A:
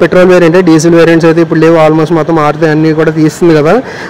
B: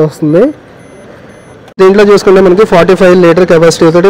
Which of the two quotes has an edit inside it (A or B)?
B